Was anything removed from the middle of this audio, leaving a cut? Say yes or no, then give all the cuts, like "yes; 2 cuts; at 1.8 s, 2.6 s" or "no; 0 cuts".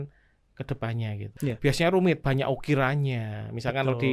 yes; 1 cut; at 1.3 s